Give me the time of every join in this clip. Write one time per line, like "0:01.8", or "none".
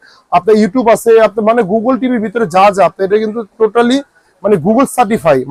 none